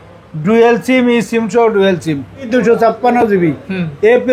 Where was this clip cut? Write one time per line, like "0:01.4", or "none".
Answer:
0:02.5